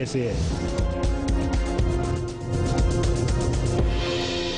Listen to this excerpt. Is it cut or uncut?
cut